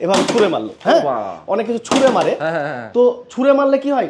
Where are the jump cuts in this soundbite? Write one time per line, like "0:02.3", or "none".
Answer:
none